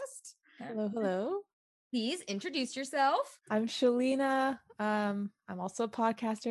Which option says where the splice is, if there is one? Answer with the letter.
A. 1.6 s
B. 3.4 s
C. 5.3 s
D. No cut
B